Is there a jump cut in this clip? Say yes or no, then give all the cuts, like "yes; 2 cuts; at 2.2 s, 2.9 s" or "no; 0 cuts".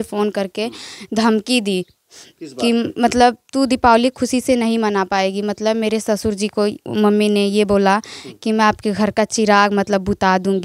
no; 0 cuts